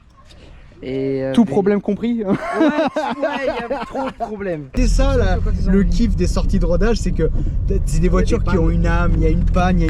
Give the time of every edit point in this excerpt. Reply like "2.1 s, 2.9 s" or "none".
4.7 s